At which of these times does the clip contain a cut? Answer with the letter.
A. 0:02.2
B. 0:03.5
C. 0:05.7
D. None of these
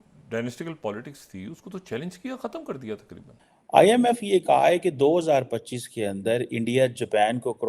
B